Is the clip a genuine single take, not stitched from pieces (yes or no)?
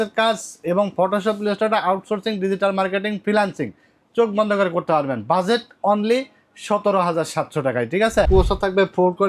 no